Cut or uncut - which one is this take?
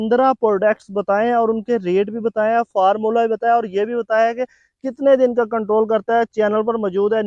uncut